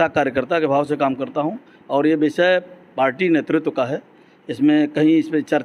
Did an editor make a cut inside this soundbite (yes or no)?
no